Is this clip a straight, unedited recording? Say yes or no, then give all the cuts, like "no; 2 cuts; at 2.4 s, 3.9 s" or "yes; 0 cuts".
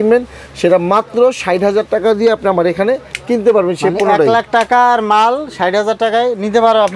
yes; 0 cuts